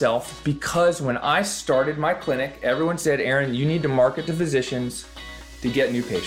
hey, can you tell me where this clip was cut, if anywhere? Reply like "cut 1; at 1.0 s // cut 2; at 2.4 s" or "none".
none